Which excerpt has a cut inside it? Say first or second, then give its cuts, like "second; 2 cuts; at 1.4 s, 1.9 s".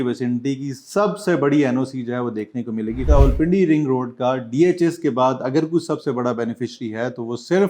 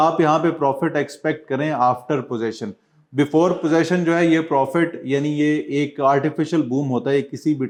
first; 1 cut; at 3.1 s